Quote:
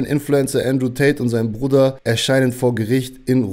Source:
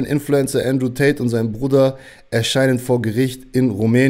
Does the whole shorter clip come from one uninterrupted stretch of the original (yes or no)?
no